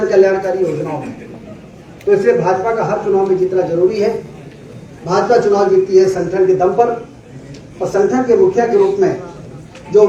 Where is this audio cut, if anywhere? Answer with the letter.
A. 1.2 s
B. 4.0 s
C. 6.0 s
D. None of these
D